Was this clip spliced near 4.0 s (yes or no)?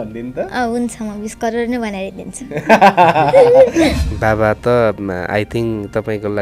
yes